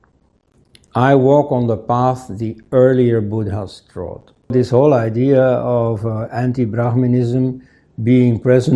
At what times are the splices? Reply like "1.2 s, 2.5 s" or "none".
4.5 s